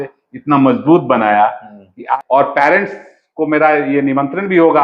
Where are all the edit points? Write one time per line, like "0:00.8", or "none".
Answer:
0:02.1